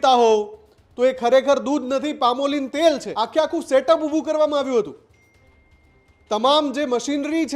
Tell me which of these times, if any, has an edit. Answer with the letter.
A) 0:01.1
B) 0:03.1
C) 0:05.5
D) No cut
B